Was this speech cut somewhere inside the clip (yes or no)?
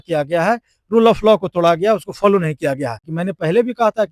yes